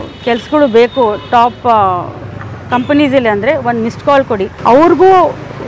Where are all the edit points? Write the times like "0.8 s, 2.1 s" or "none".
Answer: 4.5 s